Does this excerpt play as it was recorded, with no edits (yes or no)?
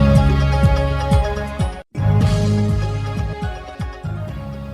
no